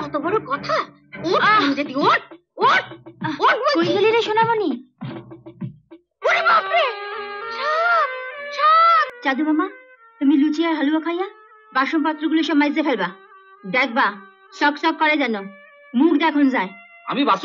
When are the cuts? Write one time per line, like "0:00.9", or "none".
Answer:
0:09.1